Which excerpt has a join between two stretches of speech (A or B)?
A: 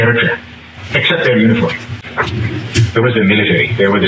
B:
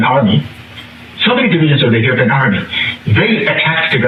A